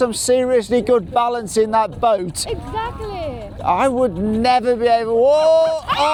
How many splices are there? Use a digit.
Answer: 0